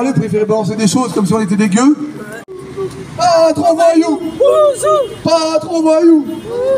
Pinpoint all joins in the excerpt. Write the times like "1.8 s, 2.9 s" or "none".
2.5 s

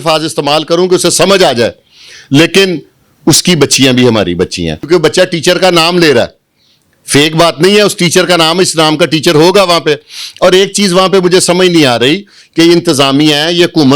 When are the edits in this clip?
4.7 s

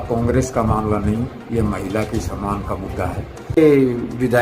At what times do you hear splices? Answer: 3.4 s

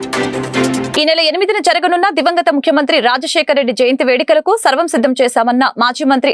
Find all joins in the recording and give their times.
0.9 s

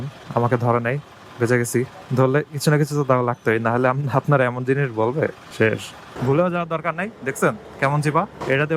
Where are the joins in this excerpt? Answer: 6.1 s

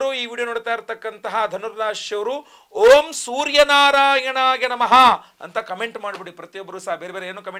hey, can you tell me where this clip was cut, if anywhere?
none

